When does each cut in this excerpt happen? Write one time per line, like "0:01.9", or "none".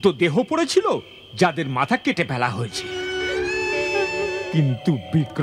0:03.0
0:04.4